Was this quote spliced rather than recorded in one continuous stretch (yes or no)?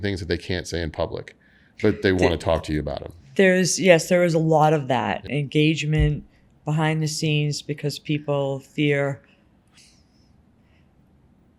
yes